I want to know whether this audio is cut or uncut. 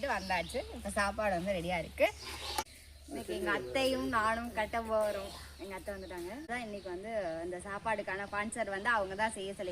cut